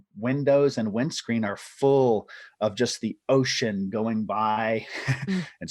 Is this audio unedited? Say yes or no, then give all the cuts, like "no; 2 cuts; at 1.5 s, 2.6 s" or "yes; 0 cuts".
no; 1 cut; at 4.6 s